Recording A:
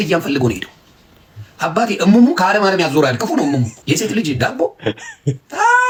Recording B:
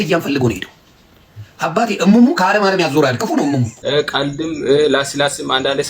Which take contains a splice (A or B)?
B